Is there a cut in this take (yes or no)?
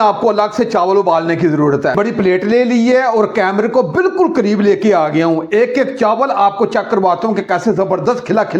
yes